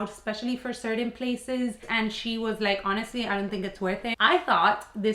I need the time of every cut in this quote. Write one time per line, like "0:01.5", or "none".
0:01.9
0:04.2